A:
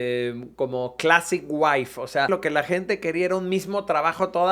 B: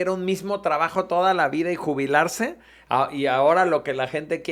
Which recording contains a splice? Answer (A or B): A